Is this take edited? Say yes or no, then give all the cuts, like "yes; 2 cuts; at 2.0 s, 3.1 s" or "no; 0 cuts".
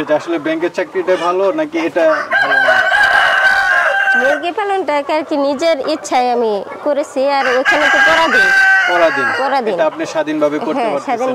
no; 0 cuts